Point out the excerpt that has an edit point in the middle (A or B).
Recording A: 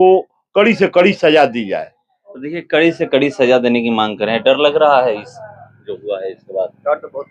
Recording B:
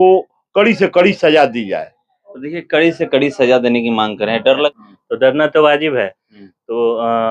B